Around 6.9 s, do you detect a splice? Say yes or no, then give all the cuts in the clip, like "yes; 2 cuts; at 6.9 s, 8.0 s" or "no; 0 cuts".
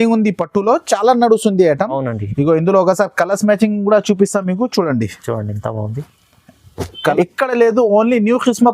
yes; 1 cut; at 6.9 s